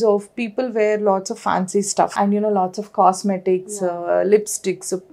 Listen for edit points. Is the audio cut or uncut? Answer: cut